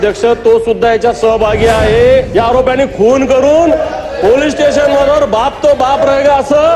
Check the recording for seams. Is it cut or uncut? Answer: cut